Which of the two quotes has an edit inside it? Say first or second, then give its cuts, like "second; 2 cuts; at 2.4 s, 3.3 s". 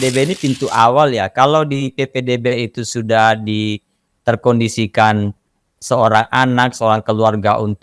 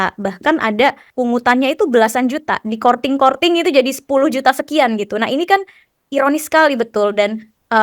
second; 1 cut; at 1.1 s